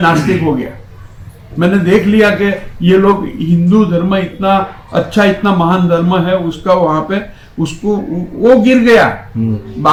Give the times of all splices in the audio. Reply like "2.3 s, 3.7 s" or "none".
none